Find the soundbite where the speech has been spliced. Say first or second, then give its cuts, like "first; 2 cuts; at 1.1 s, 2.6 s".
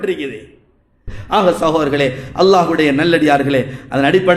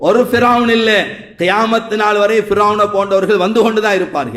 first; 1 cut; at 1.0 s